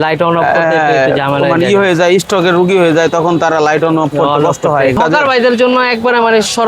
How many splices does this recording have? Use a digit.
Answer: 1